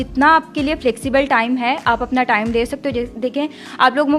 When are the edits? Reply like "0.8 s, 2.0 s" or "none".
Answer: none